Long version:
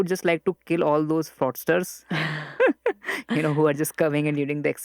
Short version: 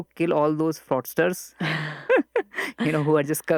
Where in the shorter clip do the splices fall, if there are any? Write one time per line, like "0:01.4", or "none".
none